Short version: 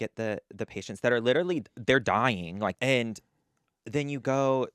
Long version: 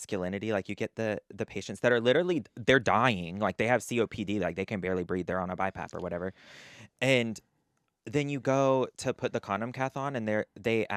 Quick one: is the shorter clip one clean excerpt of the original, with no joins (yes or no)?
no